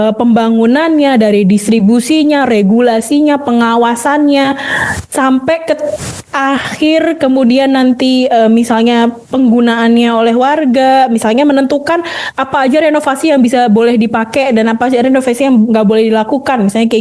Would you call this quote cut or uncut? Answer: uncut